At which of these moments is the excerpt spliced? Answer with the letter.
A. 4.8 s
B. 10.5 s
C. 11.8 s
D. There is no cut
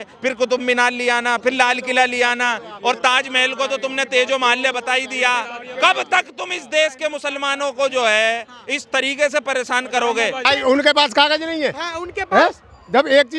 B